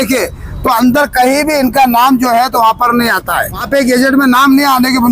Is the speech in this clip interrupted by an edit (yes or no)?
yes